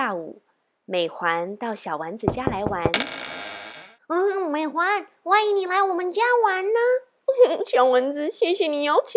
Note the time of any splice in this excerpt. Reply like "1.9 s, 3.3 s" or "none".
none